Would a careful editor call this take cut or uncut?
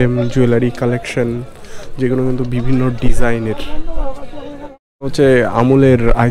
cut